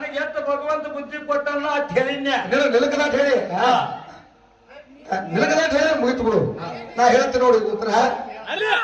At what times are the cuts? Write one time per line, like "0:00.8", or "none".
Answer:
none

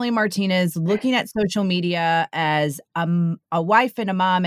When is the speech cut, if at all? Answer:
none

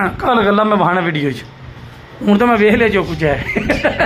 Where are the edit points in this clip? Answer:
none

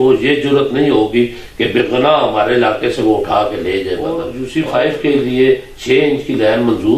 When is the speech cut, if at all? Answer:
0:04.3

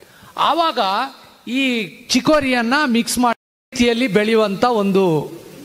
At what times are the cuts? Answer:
none

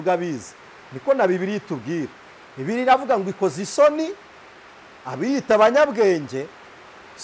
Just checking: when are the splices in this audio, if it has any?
none

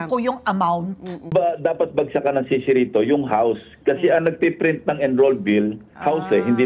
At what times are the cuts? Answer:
0:01.3

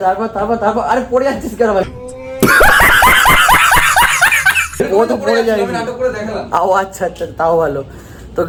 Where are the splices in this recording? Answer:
none

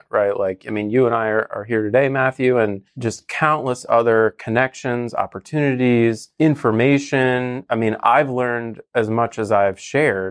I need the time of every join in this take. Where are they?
0:02.9
0:06.2

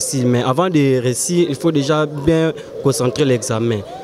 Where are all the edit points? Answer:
none

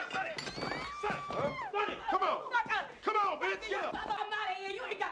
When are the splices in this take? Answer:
0:04.2

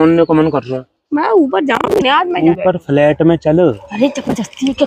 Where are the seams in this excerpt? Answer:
0:02.4
0:03.8

